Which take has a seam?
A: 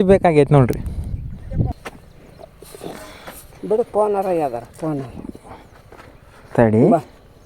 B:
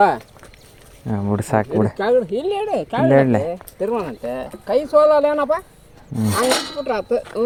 A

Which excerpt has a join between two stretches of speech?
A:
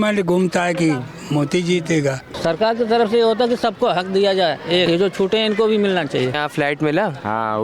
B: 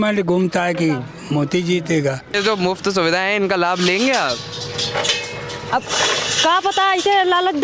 A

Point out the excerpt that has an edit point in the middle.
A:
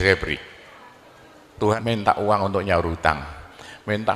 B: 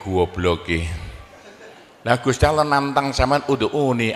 A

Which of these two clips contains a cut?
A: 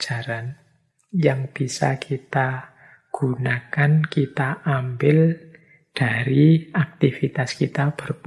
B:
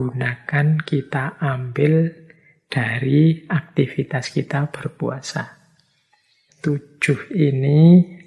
B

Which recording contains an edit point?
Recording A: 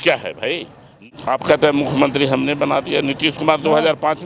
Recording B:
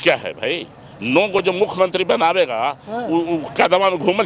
A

